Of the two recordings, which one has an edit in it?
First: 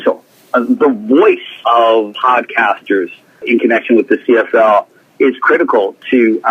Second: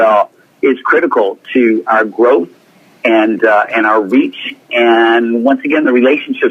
first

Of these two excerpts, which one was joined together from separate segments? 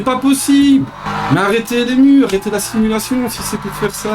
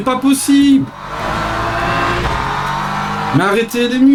first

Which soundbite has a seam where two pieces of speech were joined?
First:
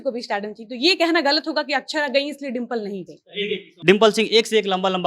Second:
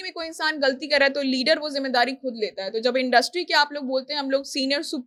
first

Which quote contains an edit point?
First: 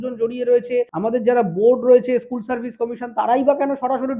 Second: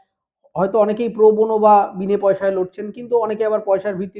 first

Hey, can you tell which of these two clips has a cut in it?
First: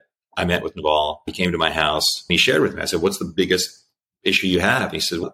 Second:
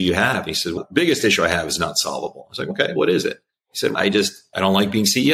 first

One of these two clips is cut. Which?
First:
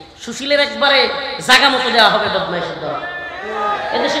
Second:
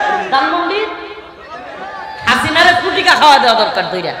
second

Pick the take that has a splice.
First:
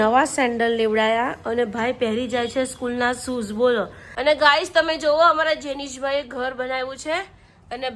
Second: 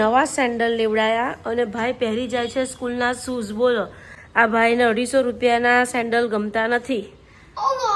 first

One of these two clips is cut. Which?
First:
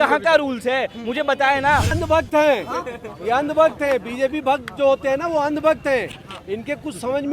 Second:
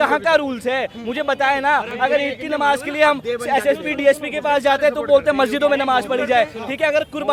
first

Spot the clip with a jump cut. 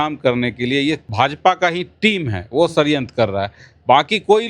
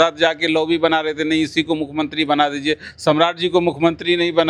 first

